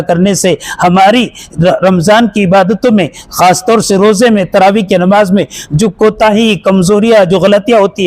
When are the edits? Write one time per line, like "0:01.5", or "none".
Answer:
none